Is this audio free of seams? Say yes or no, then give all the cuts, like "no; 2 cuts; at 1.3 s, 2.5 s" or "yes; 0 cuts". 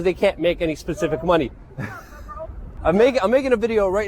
no; 1 cut; at 2.7 s